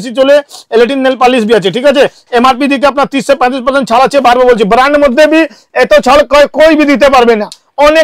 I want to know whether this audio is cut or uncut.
uncut